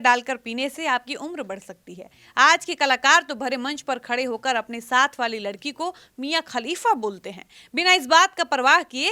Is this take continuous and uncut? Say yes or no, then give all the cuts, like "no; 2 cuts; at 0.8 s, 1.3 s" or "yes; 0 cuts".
yes; 0 cuts